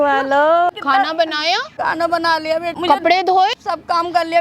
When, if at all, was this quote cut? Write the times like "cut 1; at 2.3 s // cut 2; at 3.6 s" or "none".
cut 1; at 0.7 s // cut 2; at 1.7 s // cut 3; at 2.7 s // cut 4; at 3.6 s